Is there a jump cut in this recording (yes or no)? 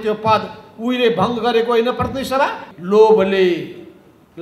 yes